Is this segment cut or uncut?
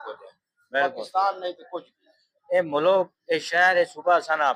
uncut